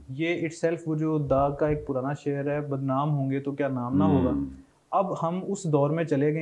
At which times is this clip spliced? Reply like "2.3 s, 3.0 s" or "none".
none